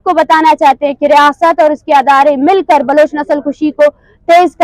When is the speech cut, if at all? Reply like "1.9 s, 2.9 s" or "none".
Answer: none